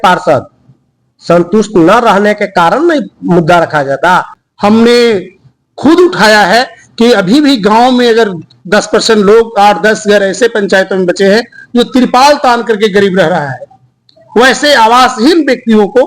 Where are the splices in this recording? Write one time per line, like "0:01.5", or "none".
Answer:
0:04.4